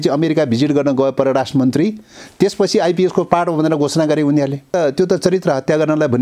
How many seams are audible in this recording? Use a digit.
1